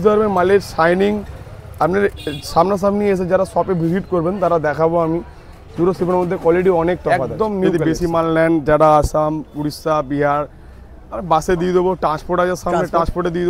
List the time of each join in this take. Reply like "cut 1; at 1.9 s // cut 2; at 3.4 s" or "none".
cut 1; at 7.6 s